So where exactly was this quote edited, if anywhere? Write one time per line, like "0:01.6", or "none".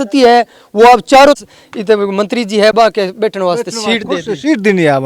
0:01.4